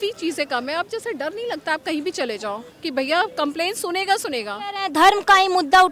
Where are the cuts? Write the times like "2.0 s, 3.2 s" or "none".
4.8 s